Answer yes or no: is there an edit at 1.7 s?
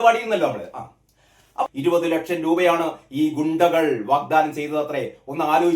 yes